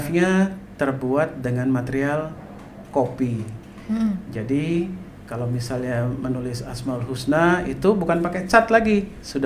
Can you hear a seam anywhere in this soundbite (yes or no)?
no